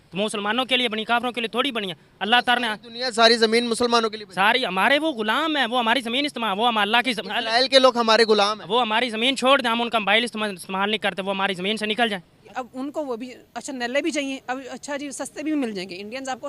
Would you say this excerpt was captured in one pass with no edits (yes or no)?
no